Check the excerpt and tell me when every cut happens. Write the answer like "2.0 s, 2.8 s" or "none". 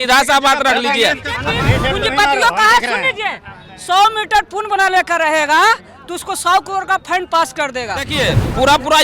1.5 s, 8.1 s